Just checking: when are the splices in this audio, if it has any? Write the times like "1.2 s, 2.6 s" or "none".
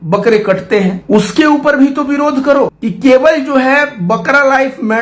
1.0 s, 2.8 s